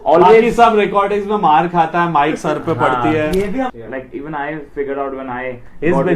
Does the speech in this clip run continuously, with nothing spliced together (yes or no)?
no